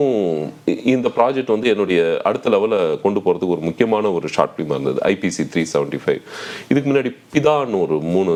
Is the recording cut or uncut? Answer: uncut